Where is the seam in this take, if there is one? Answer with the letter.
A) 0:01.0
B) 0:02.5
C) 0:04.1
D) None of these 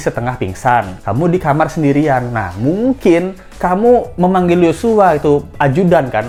D